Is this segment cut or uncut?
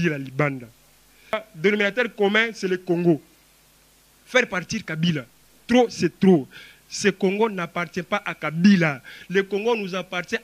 cut